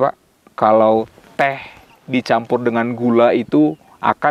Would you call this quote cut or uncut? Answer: uncut